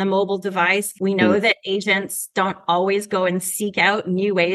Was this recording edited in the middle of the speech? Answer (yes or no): yes